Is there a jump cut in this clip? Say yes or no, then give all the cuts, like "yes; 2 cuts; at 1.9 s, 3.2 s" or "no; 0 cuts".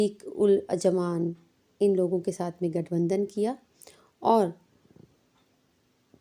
no; 0 cuts